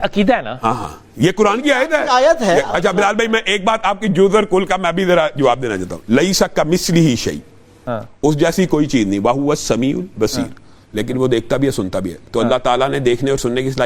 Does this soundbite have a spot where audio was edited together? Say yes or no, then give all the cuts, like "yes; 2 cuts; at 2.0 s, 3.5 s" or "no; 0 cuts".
no; 0 cuts